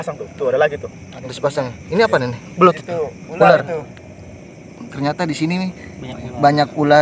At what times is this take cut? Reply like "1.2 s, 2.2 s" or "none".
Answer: none